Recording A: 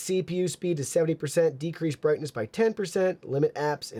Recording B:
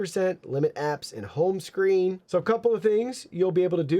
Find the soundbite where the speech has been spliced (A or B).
B